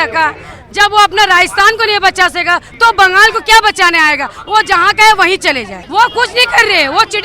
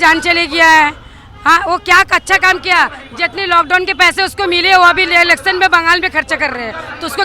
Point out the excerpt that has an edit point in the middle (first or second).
first